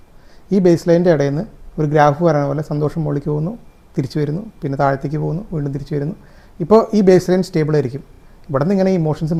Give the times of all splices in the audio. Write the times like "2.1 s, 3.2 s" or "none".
none